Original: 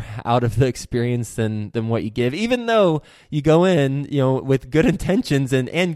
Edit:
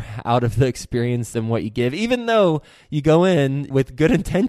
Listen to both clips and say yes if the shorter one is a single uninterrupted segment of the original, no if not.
no